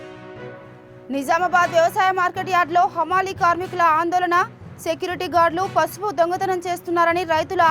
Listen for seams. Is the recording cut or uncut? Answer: uncut